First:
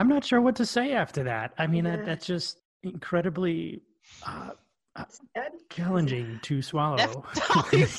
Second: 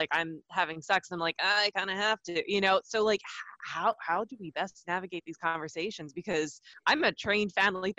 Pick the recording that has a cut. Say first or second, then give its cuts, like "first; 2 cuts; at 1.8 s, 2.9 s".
second; 1 cut; at 6.6 s